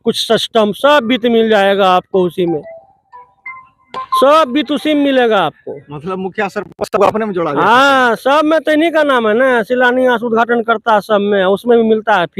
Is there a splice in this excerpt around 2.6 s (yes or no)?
no